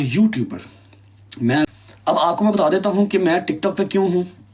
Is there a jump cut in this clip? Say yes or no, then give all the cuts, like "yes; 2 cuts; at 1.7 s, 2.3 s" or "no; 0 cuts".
yes; 1 cut; at 1.6 s